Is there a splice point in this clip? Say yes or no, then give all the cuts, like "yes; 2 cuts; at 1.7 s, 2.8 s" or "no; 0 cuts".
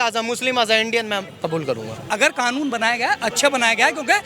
yes; 1 cut; at 2.0 s